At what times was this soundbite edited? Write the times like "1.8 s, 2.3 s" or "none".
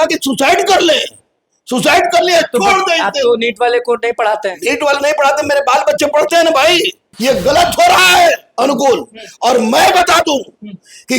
7.0 s